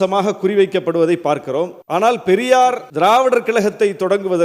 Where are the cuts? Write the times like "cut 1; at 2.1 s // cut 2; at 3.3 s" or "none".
cut 1; at 1.8 s // cut 2; at 2.9 s